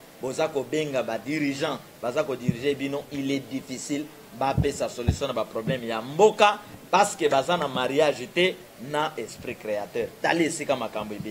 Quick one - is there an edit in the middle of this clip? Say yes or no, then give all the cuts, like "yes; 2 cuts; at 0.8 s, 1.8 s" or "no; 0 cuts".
no; 0 cuts